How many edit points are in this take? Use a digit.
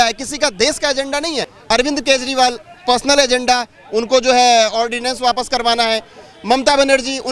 1